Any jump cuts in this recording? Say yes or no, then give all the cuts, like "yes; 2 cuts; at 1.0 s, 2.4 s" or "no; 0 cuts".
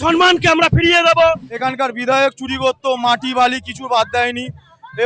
yes; 1 cut; at 1.5 s